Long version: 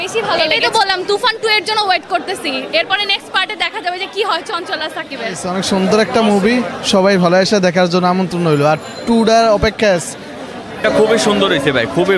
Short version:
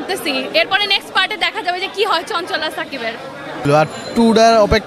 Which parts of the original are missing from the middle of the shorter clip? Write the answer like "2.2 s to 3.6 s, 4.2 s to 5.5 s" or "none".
5.8 s to 8.6 s